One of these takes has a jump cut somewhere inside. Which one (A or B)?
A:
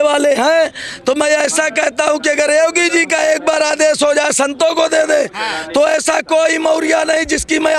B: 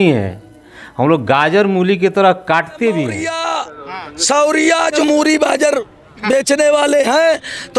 B